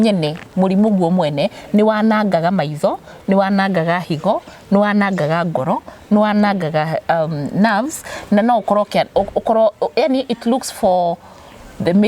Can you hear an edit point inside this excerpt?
no; 0 cuts

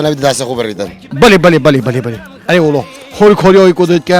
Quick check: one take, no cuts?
no; 1 cut; at 1.0 s

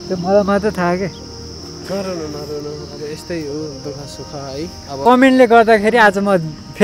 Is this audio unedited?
no; 1 cut; at 5.0 s

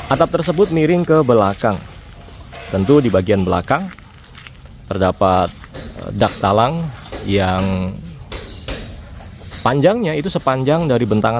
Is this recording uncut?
yes; 0 cuts

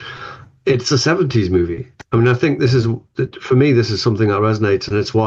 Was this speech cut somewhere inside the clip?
no; 0 cuts

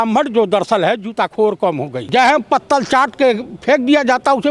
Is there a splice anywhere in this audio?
yes; 1 cut; at 2.0 s

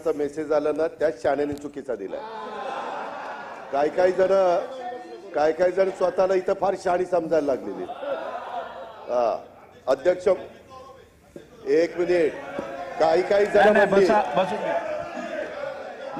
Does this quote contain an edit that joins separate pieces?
no; 0 cuts

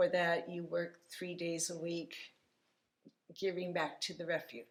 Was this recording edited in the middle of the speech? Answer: no; 0 cuts

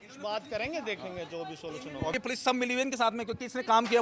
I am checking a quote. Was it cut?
yes; 1 cut; at 2.1 s

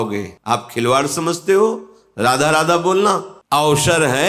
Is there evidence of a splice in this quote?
yes; 1 cut; at 3.3 s

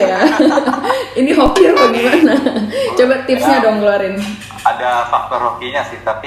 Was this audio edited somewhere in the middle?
no; 0 cuts

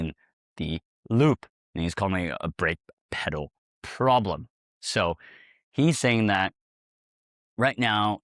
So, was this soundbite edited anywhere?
no; 0 cuts

